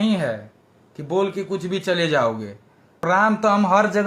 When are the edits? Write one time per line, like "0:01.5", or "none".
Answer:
0:03.0